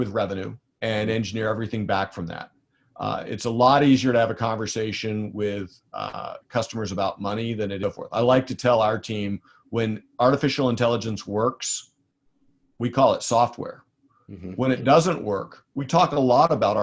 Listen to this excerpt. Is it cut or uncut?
cut